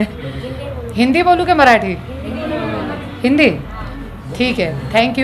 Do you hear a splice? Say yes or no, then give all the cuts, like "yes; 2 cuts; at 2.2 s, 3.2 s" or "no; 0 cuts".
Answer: no; 0 cuts